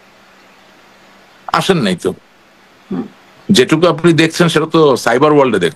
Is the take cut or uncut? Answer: uncut